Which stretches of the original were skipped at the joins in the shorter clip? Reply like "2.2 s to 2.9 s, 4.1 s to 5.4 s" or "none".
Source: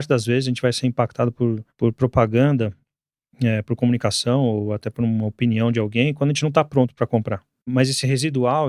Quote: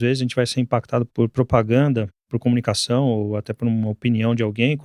1.3 s to 1.7 s, 2.9 s to 3.7 s